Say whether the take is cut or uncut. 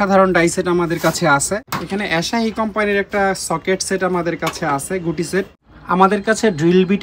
cut